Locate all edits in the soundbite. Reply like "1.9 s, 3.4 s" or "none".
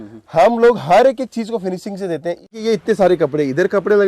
2.6 s